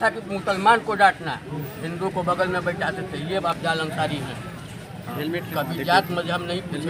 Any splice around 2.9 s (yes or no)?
no